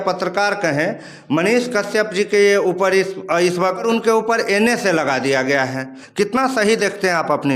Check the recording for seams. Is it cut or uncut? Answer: cut